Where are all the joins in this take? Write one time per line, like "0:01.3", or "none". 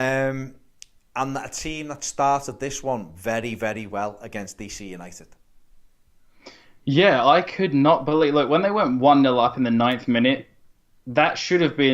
0:01.3